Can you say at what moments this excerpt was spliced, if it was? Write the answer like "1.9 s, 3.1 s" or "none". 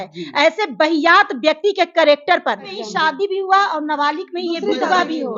2.7 s